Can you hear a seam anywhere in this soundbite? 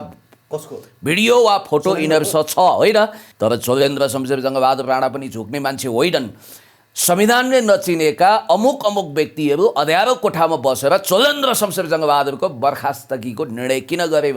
yes; 1 cut; at 3.2 s

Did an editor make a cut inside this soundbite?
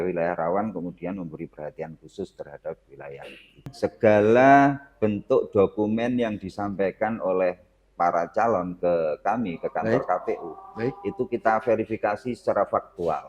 yes; 1 cut; at 3.7 s

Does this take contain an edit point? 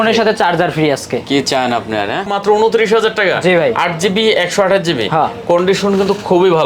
yes; 1 cut; at 2.3 s

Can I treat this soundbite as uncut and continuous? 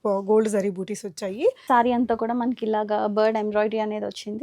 no; 1 cut; at 1.6 s

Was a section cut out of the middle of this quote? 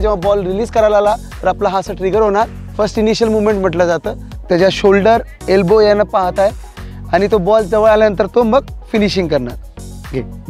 yes; 3 cuts; at 1.3 s, 2.6 s, 4.3 s

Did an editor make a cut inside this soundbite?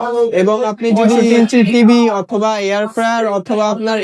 yes; 1 cut; at 1.3 s

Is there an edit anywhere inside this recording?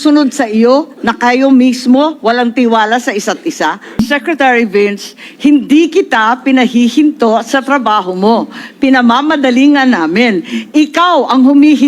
yes; 1 cut; at 4.0 s

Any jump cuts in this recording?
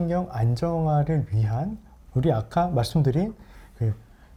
no; 0 cuts

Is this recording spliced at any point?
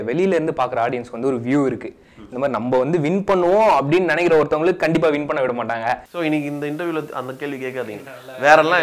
yes; 1 cut; at 6.1 s

